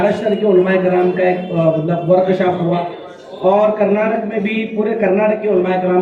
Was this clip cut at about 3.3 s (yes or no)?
no